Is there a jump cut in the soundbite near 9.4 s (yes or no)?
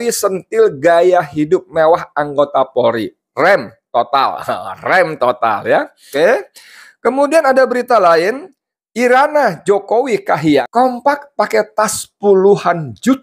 no